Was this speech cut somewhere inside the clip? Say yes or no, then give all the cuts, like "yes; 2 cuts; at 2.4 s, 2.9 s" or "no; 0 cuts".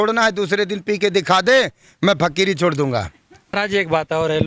yes; 1 cut; at 3.5 s